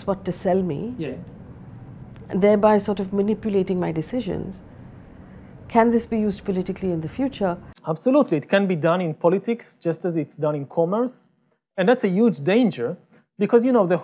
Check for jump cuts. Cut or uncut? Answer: cut